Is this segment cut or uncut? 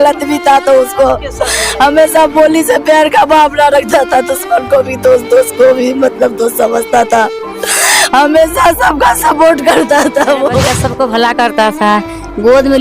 cut